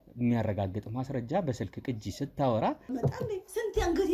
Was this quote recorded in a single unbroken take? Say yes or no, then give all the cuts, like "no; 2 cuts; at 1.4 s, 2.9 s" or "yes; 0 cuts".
no; 1 cut; at 2.8 s